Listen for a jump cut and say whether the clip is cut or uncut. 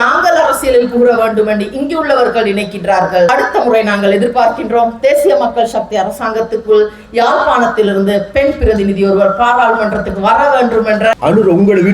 cut